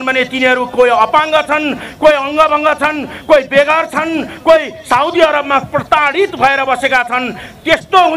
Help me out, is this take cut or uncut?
uncut